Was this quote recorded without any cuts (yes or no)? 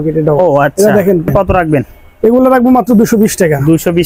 no